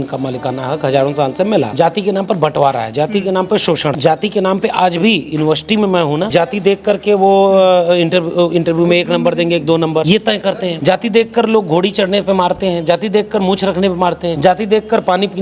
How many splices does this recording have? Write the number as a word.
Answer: five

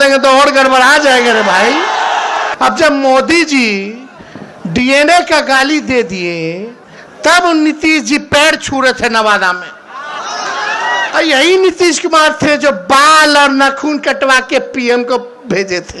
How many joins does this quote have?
one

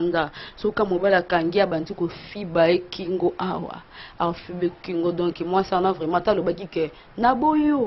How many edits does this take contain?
zero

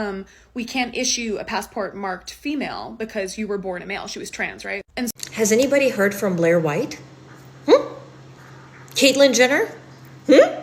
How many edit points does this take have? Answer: one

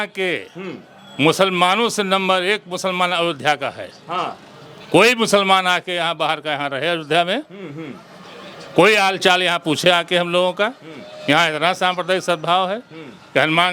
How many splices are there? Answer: zero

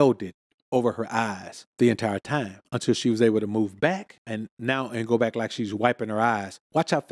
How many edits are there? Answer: zero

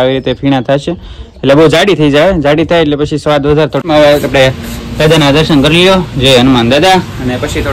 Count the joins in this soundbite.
one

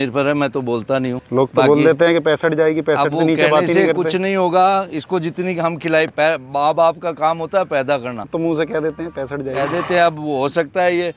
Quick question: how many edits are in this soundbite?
two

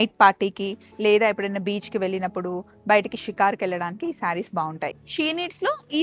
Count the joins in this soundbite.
one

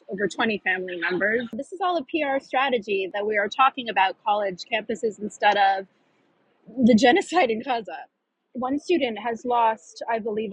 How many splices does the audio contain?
three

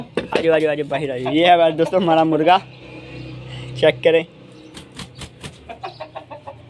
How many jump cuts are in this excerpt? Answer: zero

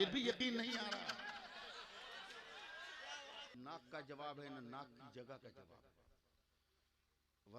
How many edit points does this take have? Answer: one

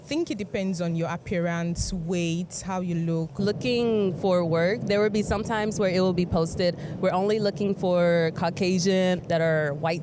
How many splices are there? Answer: two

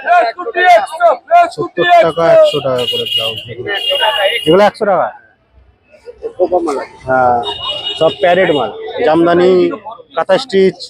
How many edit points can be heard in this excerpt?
one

